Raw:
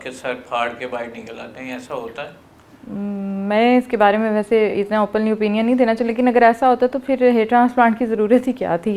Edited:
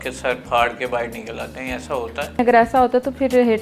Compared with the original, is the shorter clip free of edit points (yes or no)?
no